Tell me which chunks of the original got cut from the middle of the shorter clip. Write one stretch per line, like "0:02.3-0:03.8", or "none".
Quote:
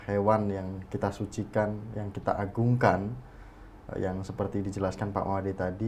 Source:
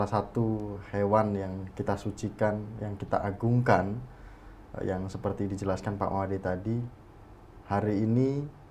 none

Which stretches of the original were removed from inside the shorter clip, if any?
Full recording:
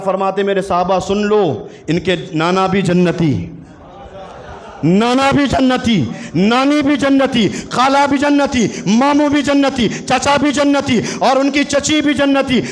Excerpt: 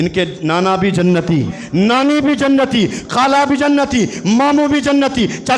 0:03.5-0:06.2

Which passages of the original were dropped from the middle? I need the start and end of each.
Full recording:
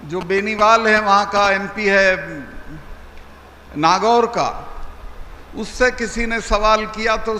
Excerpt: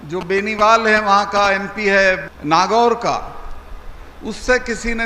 0:02.3-0:03.6

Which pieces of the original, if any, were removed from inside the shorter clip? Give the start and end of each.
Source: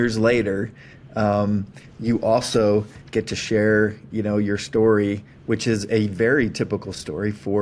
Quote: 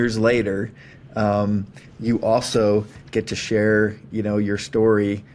none

